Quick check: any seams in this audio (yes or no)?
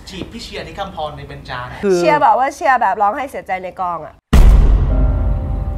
yes